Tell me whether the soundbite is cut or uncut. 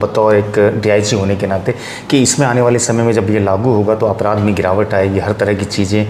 uncut